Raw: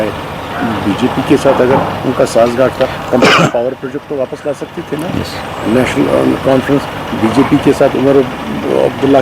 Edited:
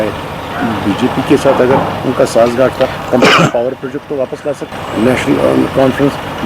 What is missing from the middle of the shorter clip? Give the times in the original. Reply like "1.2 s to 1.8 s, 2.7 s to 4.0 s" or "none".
4.7 s to 5.4 s

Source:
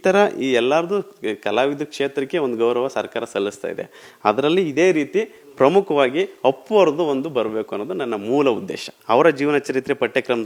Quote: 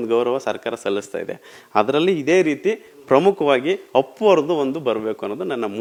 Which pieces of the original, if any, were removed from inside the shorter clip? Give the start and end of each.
none

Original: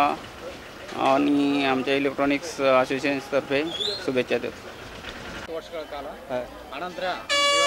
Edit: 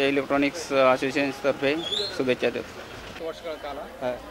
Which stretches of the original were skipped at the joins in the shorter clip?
5.0 s to 5.4 s

